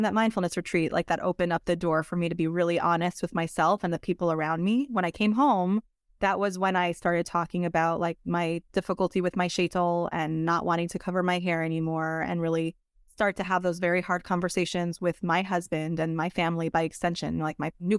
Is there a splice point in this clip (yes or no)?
no